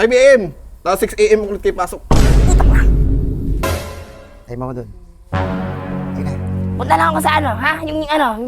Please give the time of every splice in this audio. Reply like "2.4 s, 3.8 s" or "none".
3.6 s